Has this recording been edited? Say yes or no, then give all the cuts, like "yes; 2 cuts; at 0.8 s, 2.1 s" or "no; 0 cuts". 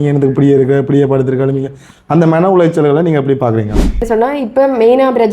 yes; 1 cut; at 4.0 s